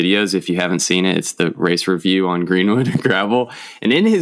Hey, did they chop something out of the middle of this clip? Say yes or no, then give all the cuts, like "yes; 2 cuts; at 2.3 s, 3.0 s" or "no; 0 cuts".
no; 0 cuts